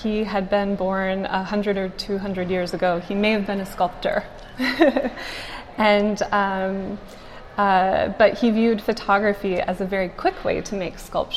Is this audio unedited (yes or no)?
yes